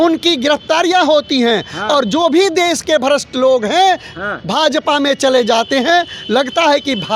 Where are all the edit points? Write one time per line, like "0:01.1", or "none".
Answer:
none